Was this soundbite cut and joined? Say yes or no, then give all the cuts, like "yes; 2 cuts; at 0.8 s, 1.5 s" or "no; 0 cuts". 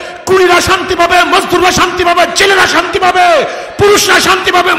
no; 0 cuts